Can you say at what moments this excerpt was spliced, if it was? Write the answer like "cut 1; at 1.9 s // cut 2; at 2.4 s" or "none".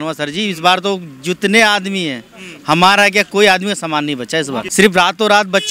cut 1; at 4.6 s